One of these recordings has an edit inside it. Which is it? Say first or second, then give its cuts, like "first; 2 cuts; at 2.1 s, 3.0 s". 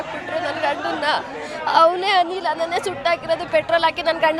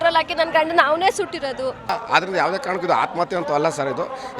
second; 1 cut; at 1.9 s